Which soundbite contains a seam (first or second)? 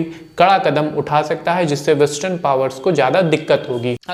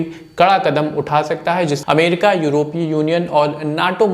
second